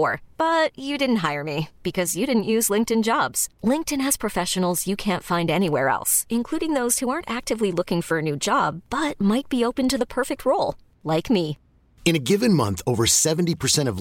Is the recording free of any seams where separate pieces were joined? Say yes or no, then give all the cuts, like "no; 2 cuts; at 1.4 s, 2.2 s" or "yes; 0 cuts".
yes; 0 cuts